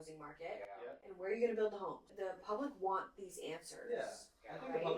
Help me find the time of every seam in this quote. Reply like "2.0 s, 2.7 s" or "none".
2.1 s